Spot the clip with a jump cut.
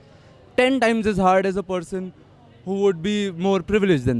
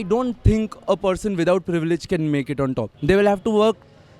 second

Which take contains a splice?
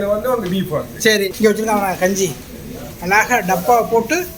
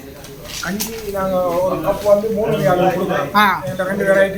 first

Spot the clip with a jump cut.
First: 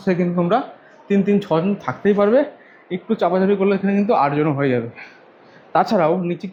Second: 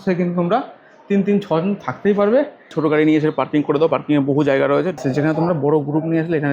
second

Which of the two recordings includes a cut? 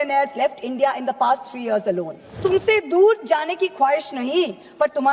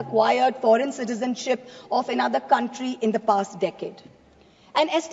first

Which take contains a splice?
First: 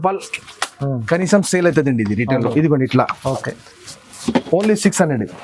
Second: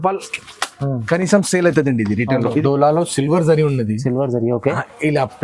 second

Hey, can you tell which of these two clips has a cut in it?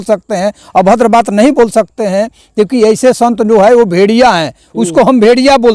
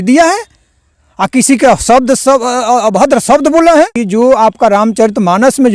second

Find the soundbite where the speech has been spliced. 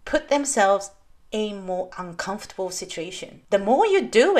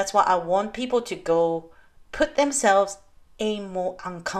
first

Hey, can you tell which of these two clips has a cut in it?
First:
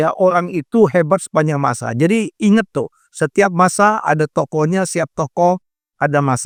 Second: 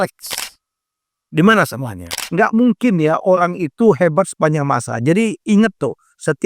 second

